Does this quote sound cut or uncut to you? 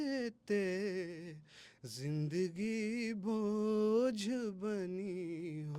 uncut